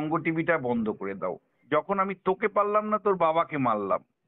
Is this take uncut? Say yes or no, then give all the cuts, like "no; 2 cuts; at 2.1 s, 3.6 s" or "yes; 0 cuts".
no; 1 cut; at 1.5 s